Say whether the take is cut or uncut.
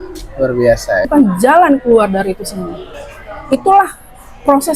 cut